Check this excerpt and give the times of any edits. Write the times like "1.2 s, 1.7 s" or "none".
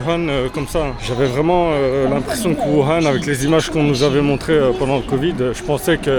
none

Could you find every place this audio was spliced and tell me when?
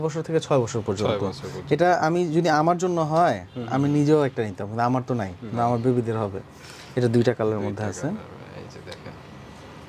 none

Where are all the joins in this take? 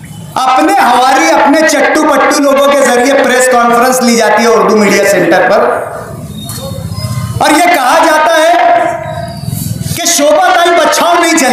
none

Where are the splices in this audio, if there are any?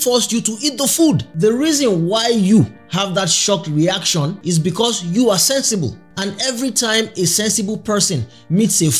1.3 s, 4.3 s

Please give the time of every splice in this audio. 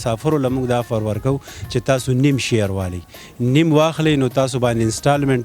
none

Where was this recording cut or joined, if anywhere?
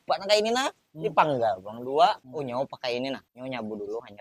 2.3 s

